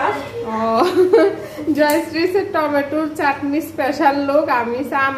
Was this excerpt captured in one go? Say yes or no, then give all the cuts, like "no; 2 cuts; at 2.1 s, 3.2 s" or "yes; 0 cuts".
no; 1 cut; at 1.5 s